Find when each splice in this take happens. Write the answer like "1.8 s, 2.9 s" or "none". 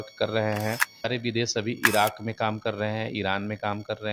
1.1 s